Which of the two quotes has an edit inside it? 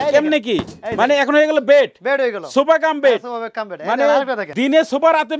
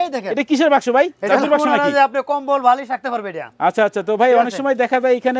first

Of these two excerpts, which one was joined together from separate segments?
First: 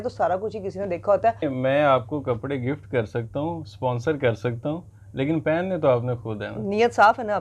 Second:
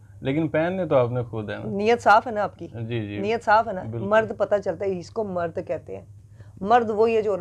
first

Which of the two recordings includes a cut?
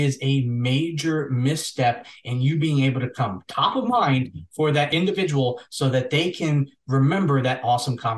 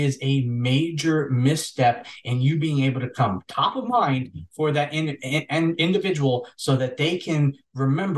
first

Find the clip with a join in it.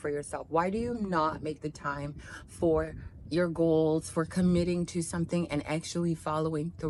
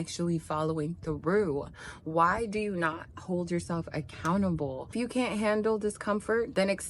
second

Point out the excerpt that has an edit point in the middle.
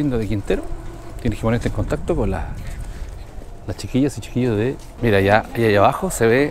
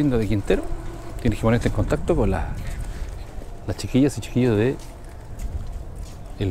first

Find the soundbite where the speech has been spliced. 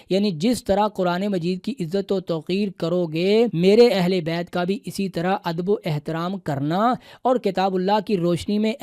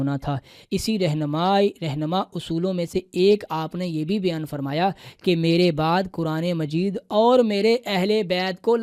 first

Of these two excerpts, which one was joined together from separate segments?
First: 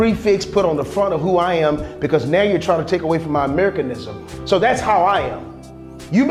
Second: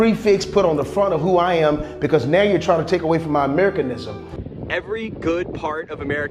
second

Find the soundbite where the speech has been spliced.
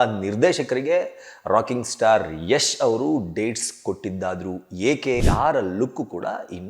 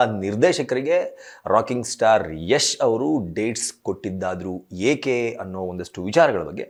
first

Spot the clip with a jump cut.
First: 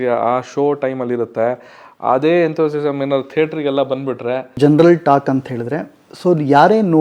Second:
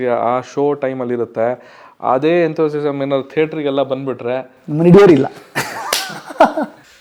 first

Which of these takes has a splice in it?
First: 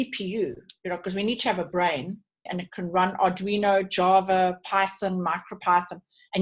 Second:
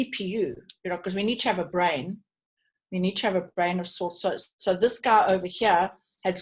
first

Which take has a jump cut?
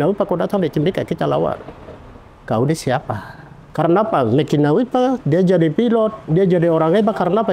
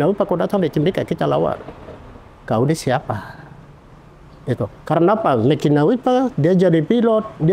first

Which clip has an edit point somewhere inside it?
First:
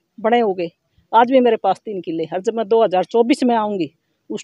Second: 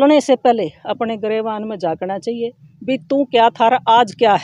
second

